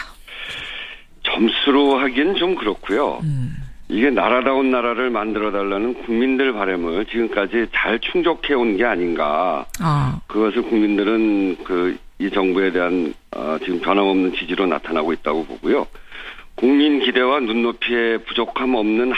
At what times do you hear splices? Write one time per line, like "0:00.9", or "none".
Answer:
0:12.3